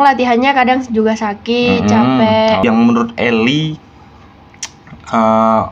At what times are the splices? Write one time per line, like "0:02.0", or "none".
0:02.6